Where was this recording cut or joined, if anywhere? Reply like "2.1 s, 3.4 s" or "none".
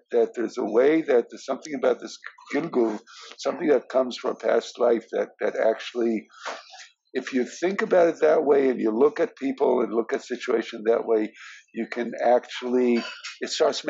none